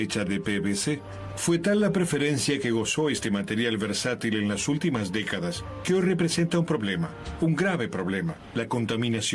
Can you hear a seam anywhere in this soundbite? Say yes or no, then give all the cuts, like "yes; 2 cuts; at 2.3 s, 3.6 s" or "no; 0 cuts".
yes; 1 cut; at 7.9 s